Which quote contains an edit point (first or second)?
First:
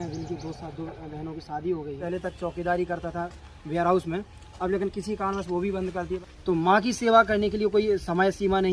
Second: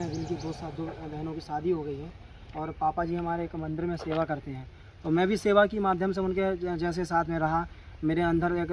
first